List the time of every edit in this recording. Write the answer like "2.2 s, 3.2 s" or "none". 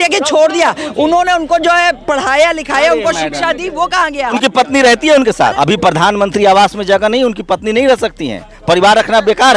0.8 s, 4.3 s, 5.5 s